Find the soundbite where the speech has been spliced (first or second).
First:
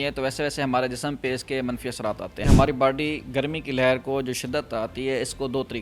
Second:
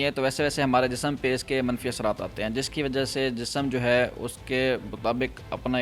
first